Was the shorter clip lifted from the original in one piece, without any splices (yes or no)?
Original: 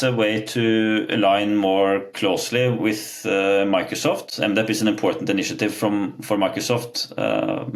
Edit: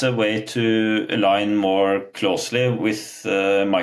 yes